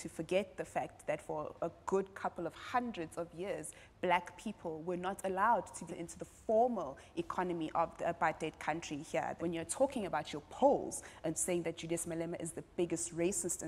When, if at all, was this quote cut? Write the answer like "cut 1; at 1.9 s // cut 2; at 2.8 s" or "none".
none